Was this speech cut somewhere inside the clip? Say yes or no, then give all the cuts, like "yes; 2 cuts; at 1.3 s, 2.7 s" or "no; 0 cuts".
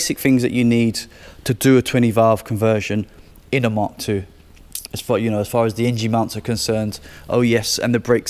no; 0 cuts